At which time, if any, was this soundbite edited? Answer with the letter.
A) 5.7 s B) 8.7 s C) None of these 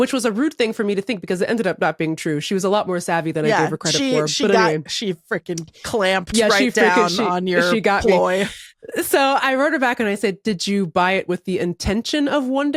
C